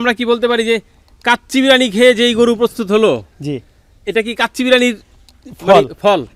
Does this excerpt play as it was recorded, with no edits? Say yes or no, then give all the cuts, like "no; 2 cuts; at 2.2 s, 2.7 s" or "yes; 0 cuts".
yes; 0 cuts